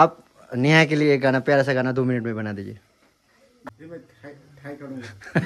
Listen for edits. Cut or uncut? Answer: cut